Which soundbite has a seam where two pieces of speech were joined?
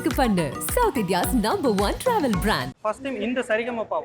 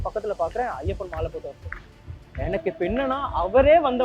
first; 1 cut; at 2.7 s

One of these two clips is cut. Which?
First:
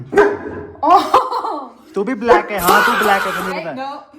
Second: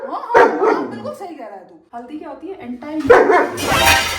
second; 1 cut; at 1.8 s

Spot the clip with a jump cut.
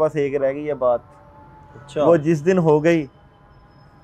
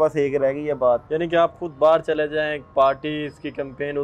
second; 1 cut; at 1.1 s

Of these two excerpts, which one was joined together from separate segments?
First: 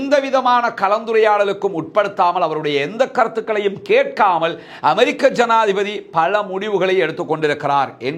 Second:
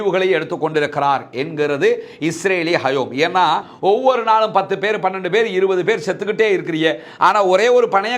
second; 1 cut; at 3.7 s

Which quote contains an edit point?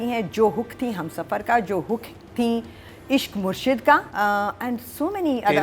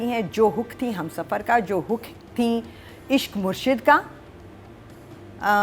first; 1 cut; at 4.1 s

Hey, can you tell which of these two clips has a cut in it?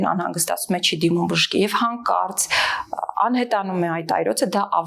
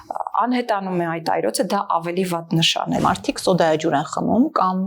second; 1 cut; at 3.0 s

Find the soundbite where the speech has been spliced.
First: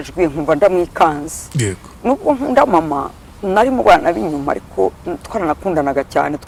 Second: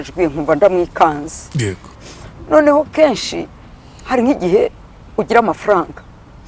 second; 1 cut; at 1.9 s

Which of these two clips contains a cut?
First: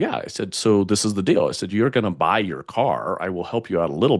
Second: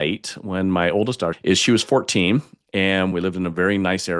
second; 2 cuts; at 1.4 s, 3.1 s

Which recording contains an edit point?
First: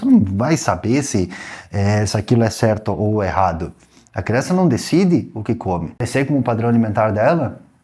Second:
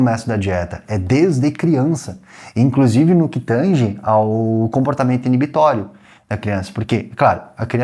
first; 1 cut; at 6.0 s

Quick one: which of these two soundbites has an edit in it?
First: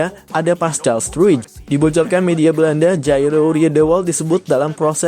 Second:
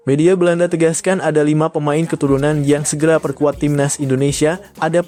first; 1 cut; at 1.5 s

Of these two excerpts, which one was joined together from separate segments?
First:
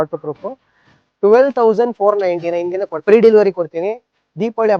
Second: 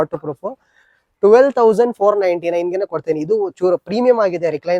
first; 1 cut; at 2.9 s

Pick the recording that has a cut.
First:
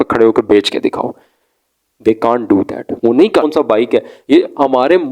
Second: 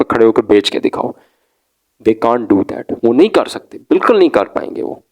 first; 1 cut; at 3.5 s

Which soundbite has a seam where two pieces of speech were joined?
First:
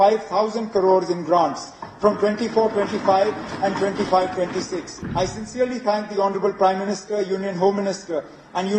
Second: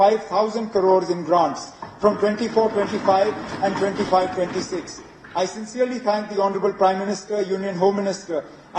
first; 1 cut; at 5.0 s

